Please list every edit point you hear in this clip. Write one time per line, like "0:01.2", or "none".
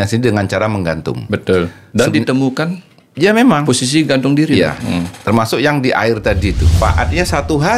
0:06.8